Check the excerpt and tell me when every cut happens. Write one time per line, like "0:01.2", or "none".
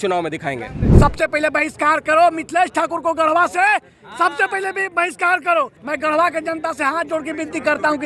0:00.9
0:05.8